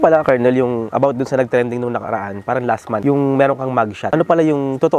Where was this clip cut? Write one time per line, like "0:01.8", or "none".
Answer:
none

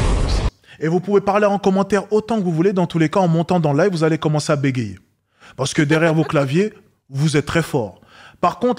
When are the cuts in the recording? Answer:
none

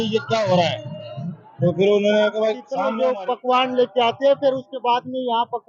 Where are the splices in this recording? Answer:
0:02.7

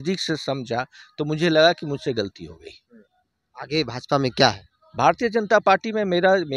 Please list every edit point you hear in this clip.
none

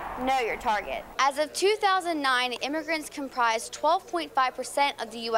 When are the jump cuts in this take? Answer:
0:01.1

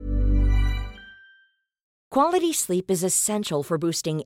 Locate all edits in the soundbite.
0:02.0

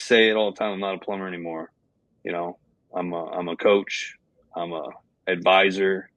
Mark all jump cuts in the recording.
none

